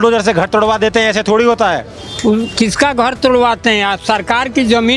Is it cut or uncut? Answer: uncut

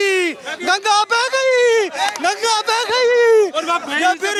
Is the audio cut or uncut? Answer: uncut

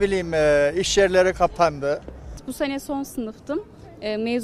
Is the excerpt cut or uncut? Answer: cut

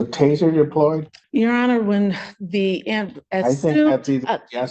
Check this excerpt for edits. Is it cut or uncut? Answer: cut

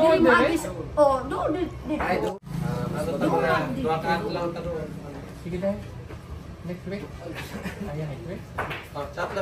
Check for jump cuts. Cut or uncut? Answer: cut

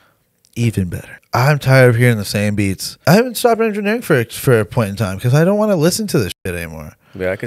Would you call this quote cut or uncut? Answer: cut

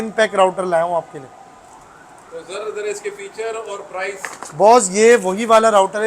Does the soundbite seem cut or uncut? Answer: uncut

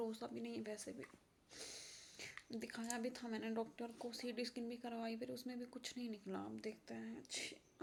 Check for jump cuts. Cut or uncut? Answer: uncut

